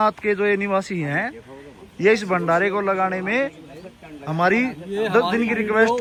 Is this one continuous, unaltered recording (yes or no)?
yes